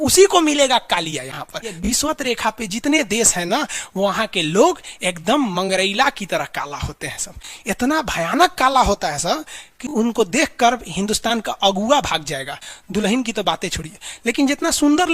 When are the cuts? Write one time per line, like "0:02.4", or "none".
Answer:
0:01.7